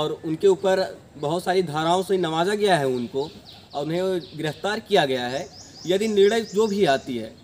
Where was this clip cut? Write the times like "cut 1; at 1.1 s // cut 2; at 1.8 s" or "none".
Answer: none